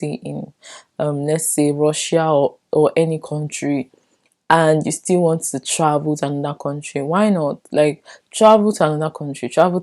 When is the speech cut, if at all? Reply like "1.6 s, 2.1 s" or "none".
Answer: none